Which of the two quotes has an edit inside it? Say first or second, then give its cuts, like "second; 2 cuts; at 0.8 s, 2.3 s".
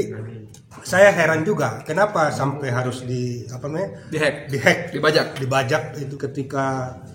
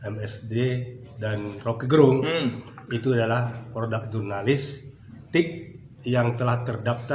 first; 1 cut; at 6.1 s